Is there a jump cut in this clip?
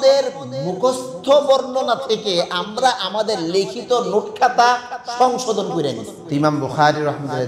yes; 1 cut; at 6.1 s

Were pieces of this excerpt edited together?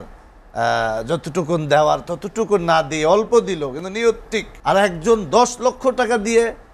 yes; 1 cut; at 4.5 s

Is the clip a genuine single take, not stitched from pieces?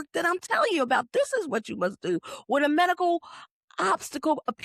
yes; 0 cuts

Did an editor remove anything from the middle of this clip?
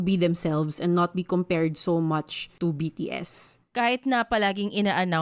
yes; 2 cuts; at 2.4 s, 3.6 s

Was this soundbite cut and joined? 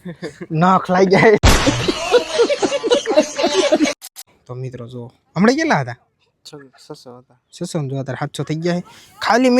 yes; 2 cuts; at 1.4 s, 3.8 s

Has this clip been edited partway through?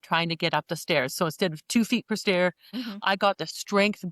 yes; 1 cut; at 2.7 s

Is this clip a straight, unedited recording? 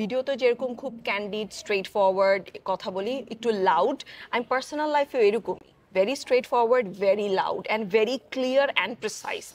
yes; 0 cuts

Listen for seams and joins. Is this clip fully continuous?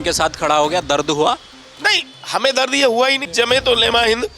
no; 1 cut; at 3.2 s

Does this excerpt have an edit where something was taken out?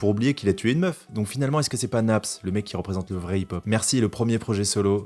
yes; 2 cuts; at 1.1 s, 3.6 s

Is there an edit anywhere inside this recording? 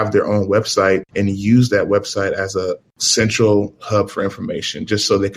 no; 0 cuts

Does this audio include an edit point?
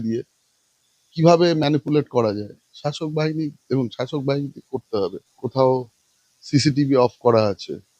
yes; 1 cut; at 5.3 s

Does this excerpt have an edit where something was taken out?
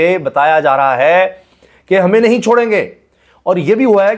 no; 0 cuts

